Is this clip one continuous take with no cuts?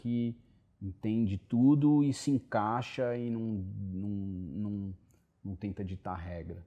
yes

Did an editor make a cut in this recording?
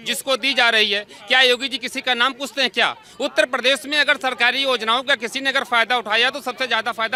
no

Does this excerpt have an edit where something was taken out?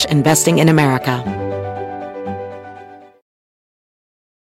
yes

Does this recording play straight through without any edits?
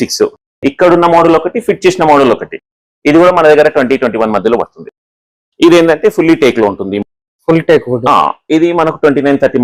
yes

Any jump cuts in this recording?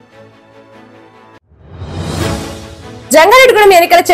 yes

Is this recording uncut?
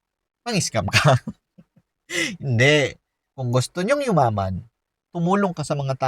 no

